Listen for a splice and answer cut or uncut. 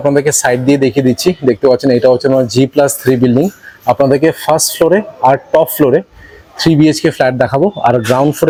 uncut